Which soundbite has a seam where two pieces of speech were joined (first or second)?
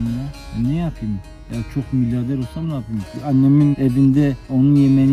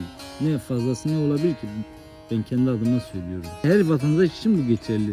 first